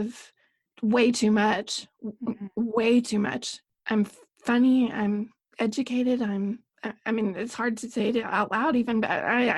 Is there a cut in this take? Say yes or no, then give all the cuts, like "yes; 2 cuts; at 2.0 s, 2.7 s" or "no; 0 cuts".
no; 0 cuts